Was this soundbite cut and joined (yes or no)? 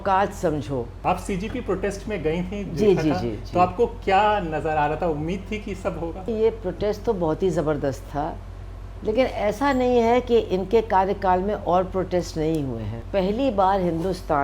yes